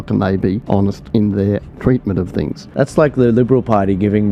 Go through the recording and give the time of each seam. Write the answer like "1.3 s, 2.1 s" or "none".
1.0 s, 2.7 s